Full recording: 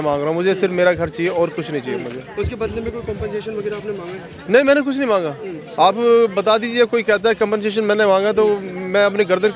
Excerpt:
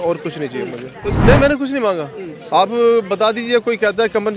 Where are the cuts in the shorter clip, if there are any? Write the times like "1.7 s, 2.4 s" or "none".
1.2 s